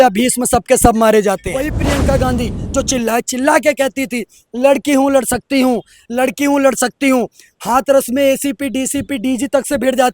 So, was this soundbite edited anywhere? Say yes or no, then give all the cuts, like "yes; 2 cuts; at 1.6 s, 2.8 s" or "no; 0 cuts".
yes; 1 cut; at 1.7 s